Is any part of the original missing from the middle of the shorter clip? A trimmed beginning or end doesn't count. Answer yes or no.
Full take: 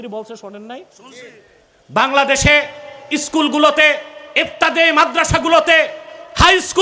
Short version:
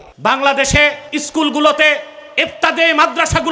yes